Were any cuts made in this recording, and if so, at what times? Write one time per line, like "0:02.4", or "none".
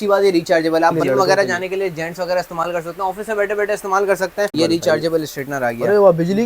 0:01.0
0:04.5